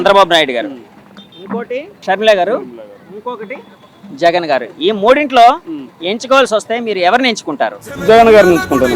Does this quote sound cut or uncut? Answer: cut